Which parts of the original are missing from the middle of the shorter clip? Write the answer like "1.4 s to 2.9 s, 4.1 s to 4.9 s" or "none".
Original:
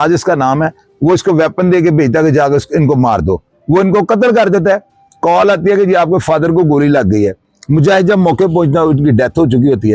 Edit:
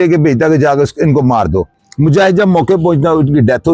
3.5 s to 7.5 s